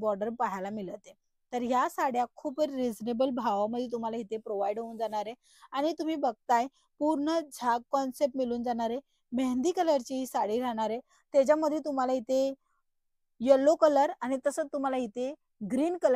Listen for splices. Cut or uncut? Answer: uncut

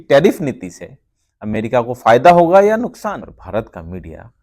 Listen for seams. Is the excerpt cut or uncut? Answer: cut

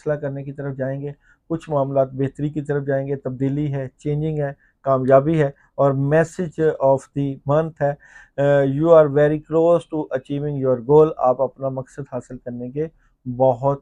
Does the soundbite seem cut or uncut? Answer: uncut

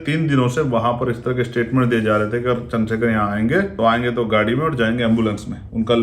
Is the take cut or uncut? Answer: cut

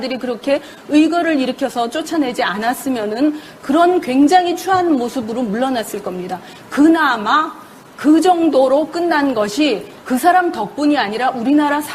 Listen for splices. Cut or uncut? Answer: cut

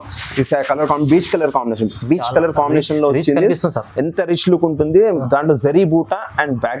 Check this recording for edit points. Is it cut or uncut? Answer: uncut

